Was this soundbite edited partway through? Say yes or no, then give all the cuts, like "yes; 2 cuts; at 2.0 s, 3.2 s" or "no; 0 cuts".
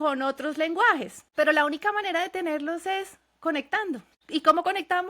yes; 2 cuts; at 1.2 s, 4.1 s